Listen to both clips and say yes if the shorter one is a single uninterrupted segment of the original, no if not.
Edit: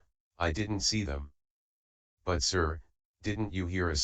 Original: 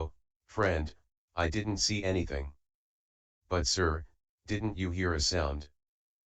no